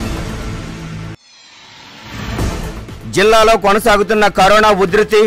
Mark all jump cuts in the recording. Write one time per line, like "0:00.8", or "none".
0:00.9
0:02.9